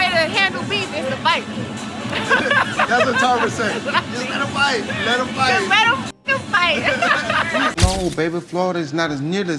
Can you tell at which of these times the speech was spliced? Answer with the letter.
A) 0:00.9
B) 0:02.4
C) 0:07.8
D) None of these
C